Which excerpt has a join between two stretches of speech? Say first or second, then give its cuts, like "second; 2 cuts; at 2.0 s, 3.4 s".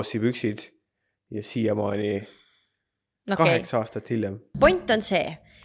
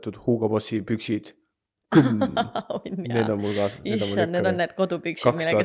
first; 1 cut; at 4.5 s